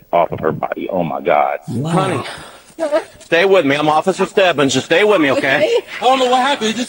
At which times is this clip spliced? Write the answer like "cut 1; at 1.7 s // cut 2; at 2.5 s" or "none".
cut 1; at 1.7 s // cut 2; at 5.9 s